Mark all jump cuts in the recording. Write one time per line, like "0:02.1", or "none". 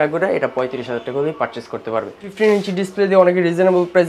0:02.2